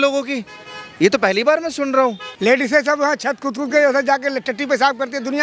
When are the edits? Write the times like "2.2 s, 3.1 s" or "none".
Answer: 2.3 s